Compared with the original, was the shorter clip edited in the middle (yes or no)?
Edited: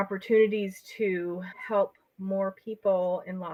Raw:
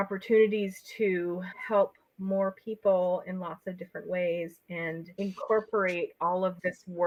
no